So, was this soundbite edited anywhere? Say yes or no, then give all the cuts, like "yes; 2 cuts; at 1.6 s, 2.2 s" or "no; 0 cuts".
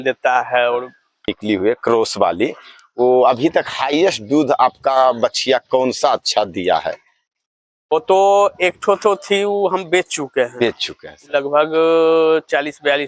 yes; 1 cut; at 1.3 s